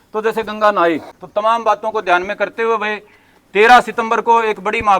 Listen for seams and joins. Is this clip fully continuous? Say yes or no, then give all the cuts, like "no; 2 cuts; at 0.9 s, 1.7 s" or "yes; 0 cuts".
no; 1 cut; at 1.1 s